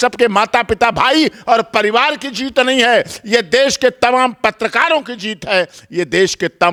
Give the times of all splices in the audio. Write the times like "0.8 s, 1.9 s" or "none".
none